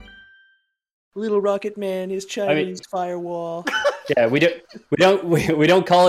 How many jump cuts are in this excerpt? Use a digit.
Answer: 1